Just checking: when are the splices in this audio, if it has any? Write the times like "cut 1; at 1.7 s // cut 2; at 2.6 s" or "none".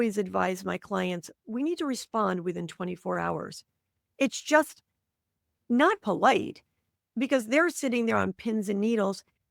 none